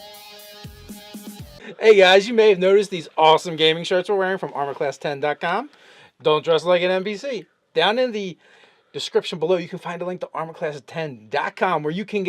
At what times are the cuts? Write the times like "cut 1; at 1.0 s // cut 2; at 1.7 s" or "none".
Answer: cut 1; at 1.5 s // cut 2; at 11.1 s